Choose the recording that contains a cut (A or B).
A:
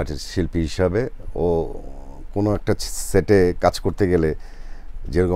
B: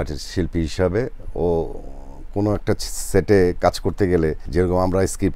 B